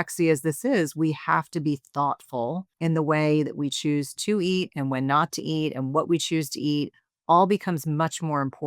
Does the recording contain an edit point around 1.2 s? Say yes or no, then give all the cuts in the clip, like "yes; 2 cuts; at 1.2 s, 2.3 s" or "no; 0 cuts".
no; 1 cut; at 2.7 s